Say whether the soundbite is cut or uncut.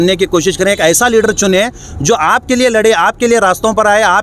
uncut